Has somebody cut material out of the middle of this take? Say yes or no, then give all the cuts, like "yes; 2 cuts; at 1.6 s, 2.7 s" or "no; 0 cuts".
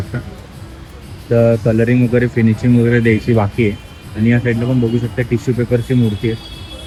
no; 0 cuts